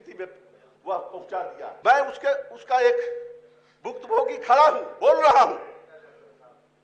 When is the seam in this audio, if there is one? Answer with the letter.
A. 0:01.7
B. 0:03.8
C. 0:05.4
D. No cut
A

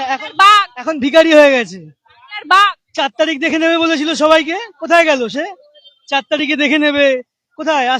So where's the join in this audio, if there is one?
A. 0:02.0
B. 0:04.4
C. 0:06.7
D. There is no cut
D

